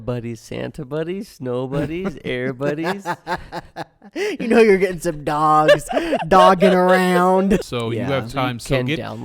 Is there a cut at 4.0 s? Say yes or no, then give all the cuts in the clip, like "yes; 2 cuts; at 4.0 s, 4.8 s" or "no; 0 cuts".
no; 1 cut; at 7.6 s